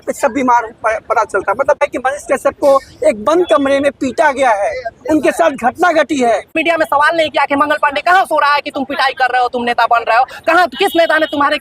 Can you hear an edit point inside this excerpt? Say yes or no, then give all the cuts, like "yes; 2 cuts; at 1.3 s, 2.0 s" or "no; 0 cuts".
yes; 2 cuts; at 1.8 s, 6.5 s